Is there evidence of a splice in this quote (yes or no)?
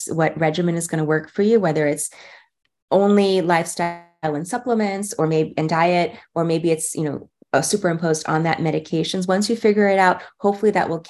no